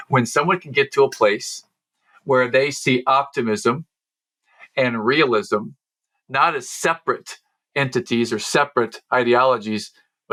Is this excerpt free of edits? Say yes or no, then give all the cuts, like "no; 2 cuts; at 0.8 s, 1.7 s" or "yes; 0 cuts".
yes; 0 cuts